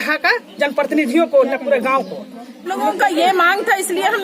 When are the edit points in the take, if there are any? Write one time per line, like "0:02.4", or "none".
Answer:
0:02.7